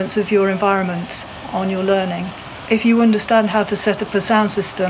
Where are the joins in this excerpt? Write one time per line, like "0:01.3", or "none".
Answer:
0:02.6